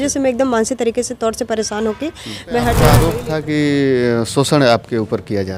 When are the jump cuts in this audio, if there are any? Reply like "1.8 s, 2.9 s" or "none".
3.0 s